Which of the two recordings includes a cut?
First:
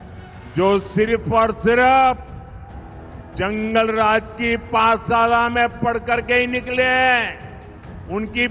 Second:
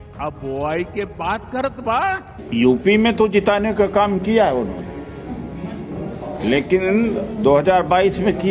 second; 1 cut; at 2.3 s

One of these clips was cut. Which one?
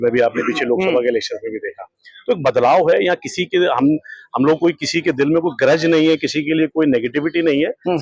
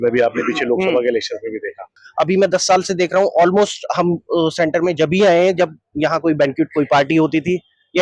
second; 1 cut; at 2.0 s

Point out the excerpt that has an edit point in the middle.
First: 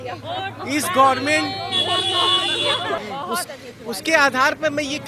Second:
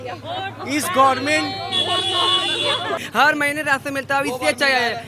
second; 1 cut; at 3.0 s

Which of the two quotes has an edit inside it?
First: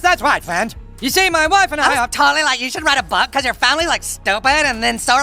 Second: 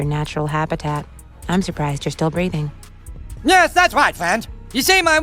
second; 1 cut; at 2.8 s

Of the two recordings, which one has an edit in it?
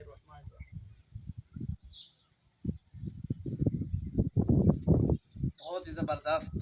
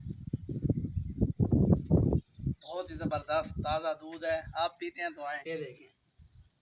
second; 1 cut; at 5.4 s

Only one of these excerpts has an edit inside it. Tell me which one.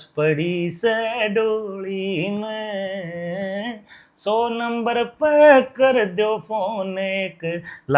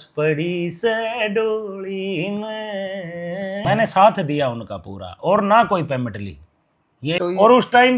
second; 2 cuts; at 3.6 s, 7.2 s

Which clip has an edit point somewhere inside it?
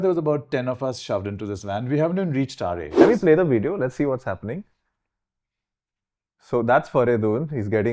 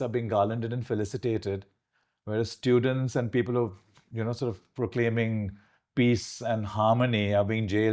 first; 1 cut; at 3.0 s

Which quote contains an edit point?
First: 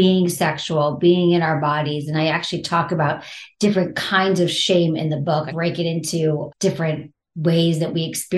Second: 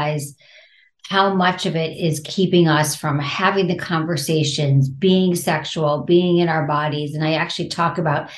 first; 2 cuts; at 5.5 s, 6.8 s

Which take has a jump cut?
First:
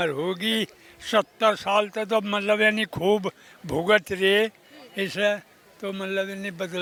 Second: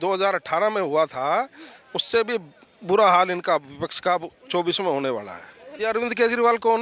second; 1 cut; at 5.6 s

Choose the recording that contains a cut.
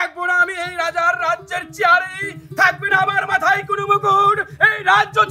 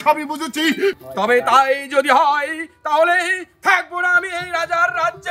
second; 1 cut; at 1.0 s

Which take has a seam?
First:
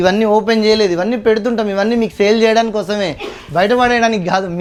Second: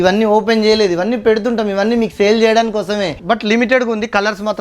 second; 1 cut; at 3.2 s

